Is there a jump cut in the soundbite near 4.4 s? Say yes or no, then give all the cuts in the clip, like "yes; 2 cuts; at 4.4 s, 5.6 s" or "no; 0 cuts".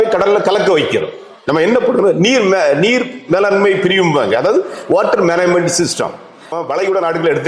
no; 1 cut; at 6.5 s